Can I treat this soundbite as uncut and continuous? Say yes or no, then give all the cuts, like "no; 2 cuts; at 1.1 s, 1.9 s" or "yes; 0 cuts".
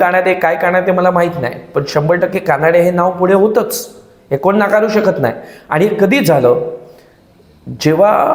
yes; 0 cuts